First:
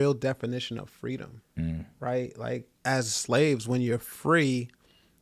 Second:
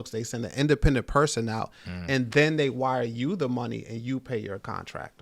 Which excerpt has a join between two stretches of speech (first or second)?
first